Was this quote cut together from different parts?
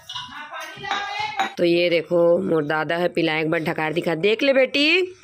yes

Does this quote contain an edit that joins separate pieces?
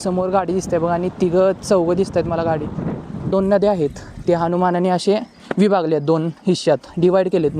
yes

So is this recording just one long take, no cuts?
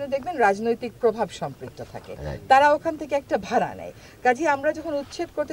yes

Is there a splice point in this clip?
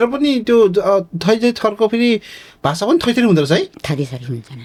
no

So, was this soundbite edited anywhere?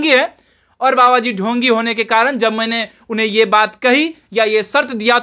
no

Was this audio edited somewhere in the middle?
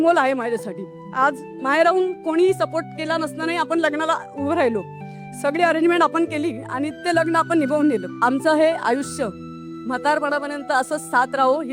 yes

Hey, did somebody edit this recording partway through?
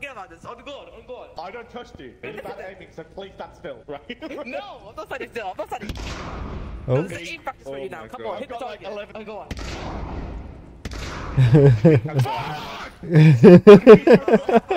yes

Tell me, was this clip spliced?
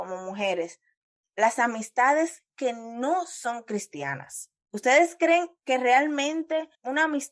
no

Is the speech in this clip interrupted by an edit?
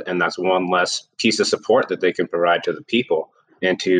no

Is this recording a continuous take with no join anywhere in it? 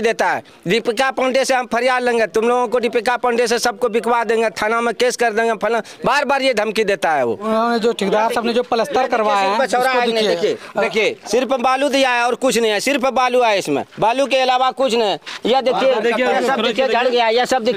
yes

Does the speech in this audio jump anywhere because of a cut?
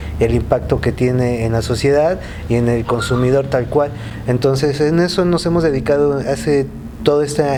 no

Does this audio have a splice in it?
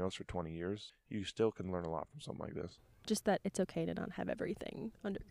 yes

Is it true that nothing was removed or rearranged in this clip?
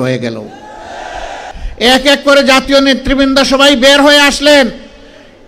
no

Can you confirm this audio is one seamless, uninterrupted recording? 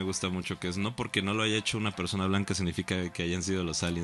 yes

